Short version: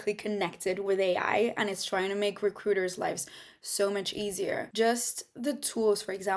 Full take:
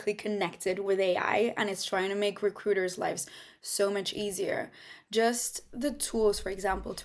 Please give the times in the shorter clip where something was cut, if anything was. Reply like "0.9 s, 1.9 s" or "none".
4.7 s